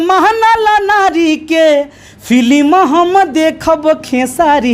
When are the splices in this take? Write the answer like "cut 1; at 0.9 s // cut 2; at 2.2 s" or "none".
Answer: none